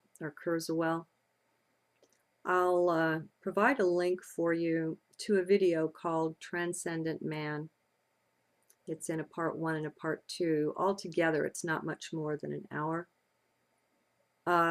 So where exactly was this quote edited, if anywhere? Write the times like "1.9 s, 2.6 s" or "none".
5.0 s